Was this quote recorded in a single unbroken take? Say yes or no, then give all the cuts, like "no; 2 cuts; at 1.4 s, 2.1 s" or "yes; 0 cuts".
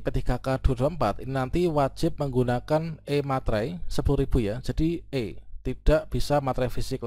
yes; 0 cuts